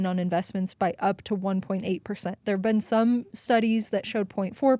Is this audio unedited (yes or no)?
yes